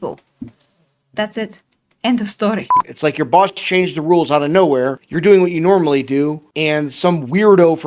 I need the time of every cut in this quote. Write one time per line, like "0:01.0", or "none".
0:02.8
0:05.0
0:06.5